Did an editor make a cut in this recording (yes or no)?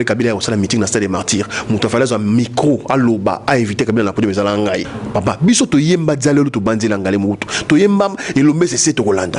yes